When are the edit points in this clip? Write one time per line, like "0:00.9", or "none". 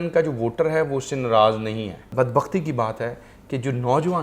0:02.0